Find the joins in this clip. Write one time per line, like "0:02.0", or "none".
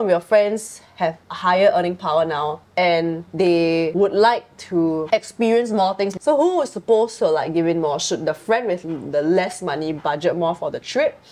0:01.3
0:02.6
0:03.8
0:06.1